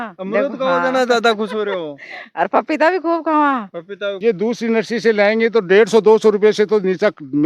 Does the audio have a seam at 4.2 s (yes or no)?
yes